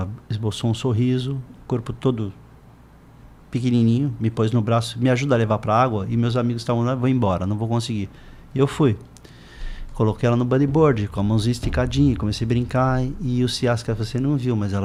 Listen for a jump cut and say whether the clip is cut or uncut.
uncut